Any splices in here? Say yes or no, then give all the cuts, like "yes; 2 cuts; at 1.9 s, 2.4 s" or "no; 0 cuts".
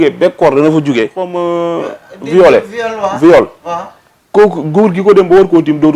yes; 1 cut; at 1.2 s